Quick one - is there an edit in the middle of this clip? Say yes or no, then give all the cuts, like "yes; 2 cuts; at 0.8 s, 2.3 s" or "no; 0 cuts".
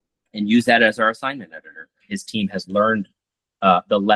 yes; 1 cut; at 2.0 s